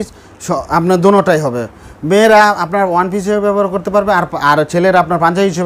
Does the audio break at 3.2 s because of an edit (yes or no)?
no